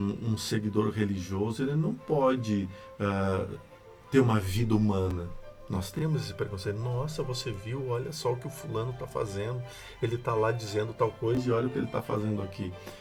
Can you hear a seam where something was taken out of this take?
no; 0 cuts

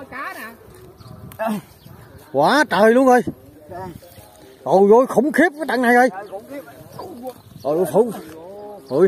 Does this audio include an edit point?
no; 0 cuts

